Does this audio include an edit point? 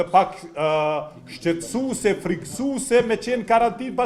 no; 0 cuts

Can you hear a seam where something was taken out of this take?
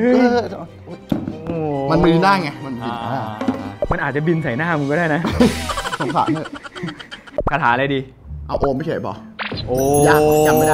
yes; 2 cuts; at 3.7 s, 7.2 s

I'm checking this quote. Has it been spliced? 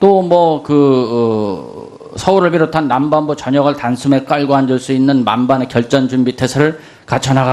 no; 0 cuts

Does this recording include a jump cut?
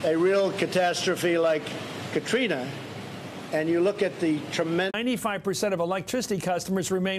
no; 0 cuts

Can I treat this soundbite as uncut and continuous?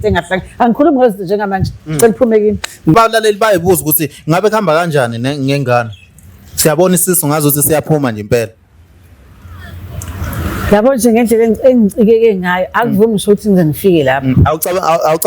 no; 1 cut; at 2.9 s

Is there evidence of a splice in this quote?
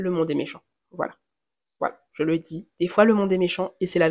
no; 0 cuts

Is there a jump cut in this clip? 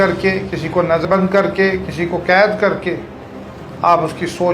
yes; 1 cut; at 1.0 s

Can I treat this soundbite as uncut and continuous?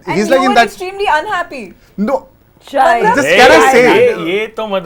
yes; 0 cuts

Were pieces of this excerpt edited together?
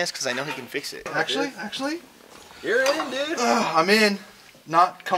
yes; 1 cut; at 1.1 s

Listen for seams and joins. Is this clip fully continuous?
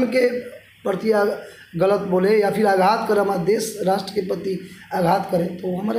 yes; 0 cuts

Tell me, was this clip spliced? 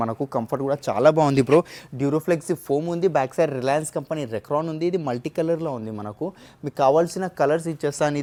no; 0 cuts

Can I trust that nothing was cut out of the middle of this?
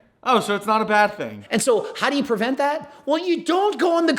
no; 1 cut; at 1.3 s

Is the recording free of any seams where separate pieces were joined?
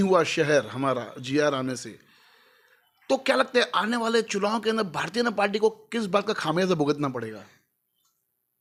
yes; 0 cuts

